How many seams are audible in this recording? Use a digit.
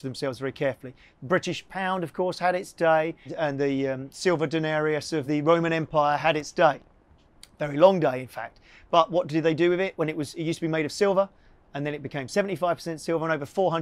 1